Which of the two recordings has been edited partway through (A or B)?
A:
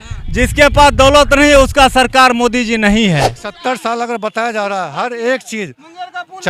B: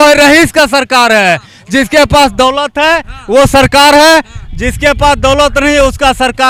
A